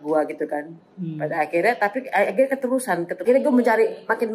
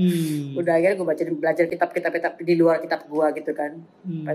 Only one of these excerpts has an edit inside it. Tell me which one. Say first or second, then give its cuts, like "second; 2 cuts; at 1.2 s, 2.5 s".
first; 1 cut; at 3.2 s